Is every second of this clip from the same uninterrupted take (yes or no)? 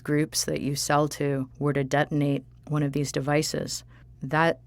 no